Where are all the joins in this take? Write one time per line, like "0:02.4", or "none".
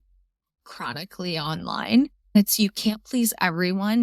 0:02.4